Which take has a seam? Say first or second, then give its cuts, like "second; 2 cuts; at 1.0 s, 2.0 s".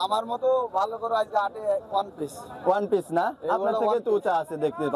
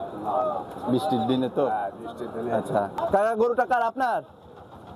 second; 1 cut; at 3.0 s